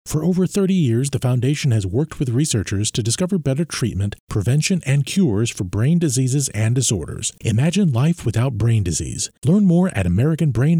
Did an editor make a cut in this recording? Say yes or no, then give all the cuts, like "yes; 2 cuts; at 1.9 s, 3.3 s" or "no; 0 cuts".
no; 0 cuts